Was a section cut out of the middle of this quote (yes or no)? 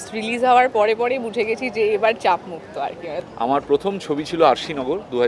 yes